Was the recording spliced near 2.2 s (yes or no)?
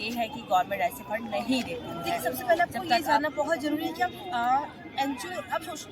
yes